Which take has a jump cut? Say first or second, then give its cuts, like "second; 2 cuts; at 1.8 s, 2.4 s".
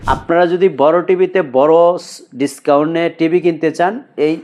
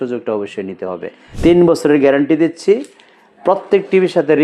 second; 1 cut; at 1.2 s